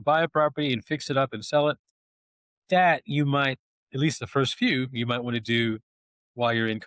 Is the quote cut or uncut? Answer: uncut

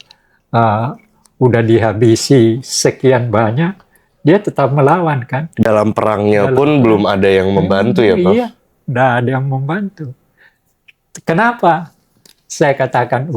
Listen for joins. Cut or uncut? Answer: uncut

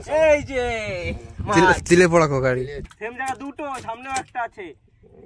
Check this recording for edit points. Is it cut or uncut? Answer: cut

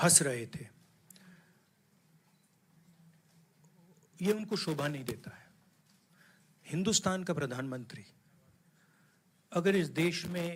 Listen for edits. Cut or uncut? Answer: uncut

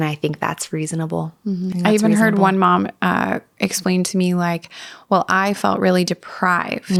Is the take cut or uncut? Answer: uncut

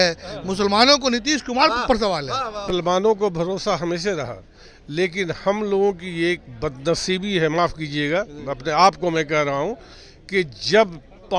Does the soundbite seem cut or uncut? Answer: cut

